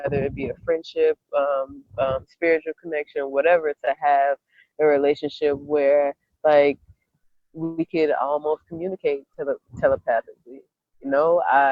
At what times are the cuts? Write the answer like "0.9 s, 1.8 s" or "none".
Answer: none